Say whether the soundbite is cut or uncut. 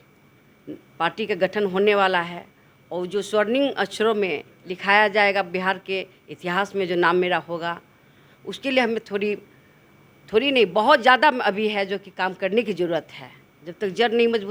uncut